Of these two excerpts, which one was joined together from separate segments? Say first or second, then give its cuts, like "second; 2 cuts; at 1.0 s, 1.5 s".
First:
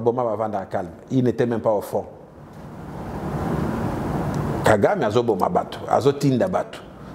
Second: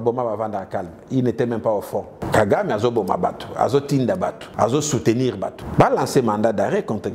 second; 3 cuts; at 2.2 s, 4.4 s, 5.6 s